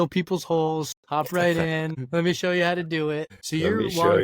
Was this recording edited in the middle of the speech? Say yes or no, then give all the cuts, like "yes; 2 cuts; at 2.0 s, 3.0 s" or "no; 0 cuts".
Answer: yes; 3 cuts; at 1.0 s, 2.0 s, 3.4 s